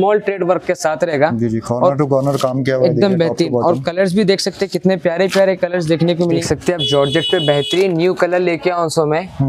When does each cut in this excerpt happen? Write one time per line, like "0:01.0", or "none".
0:06.4